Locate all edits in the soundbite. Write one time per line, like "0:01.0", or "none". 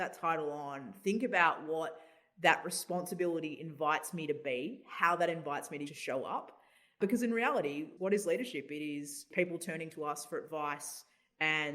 0:05.9
0:07.0
0:07.9
0:09.3

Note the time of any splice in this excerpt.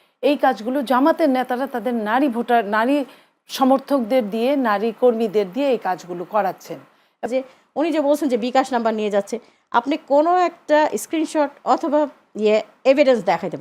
0:07.3

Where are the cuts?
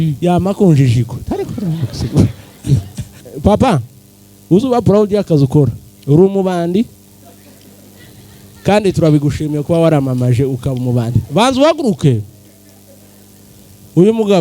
0:03.3

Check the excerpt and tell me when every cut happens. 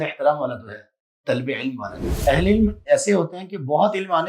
0:02.2

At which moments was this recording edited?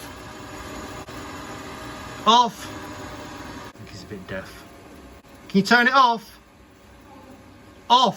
0:01.0
0:03.7
0:05.2

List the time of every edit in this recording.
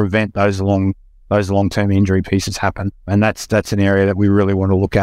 0:02.9

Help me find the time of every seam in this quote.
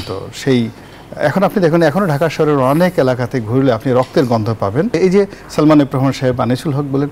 0:05.0

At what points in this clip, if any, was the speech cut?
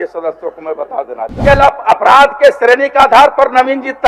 0:01.3

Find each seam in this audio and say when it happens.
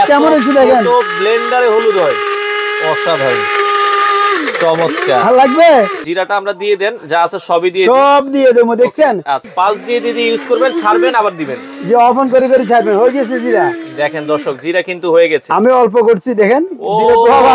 0:06.0
0:09.5

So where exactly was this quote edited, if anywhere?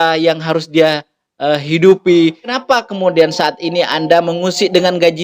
0:02.6

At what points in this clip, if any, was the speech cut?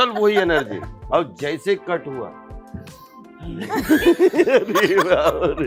none

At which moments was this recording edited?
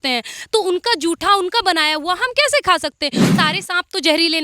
0:03.3

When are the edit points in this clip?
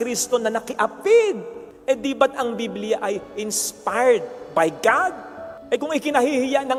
none

